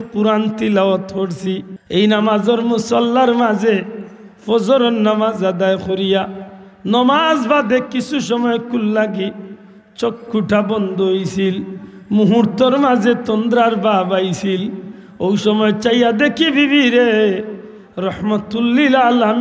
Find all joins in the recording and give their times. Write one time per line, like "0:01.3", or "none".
0:01.7